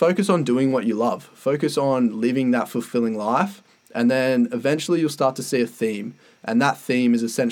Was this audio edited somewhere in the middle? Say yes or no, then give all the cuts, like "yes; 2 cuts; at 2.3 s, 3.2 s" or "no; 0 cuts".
no; 0 cuts